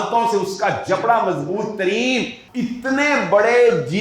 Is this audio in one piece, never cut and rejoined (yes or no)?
no